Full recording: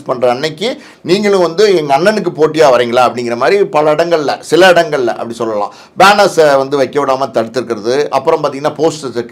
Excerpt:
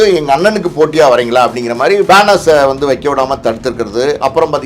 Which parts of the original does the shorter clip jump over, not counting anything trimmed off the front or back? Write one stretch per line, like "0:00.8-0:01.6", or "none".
0:03.7-0:06.0